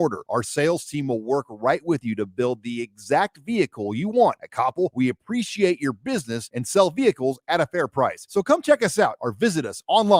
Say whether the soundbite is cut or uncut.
uncut